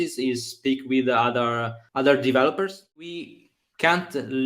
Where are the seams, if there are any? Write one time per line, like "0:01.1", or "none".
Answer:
0:01.8
0:03.0